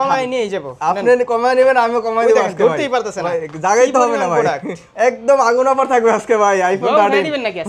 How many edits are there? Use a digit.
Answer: 1